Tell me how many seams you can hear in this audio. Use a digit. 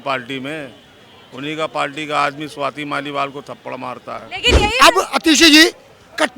1